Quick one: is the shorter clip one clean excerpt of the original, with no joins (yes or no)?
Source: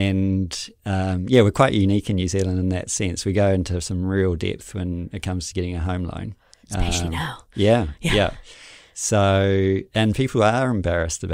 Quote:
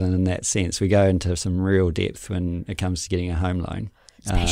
yes